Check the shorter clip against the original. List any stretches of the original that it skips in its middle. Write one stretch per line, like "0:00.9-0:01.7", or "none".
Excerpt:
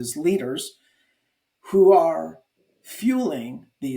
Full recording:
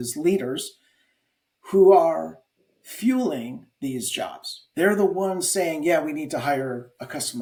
none